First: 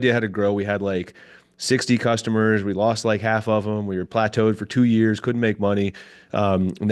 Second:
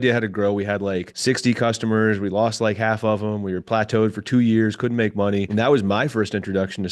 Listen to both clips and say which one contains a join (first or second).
second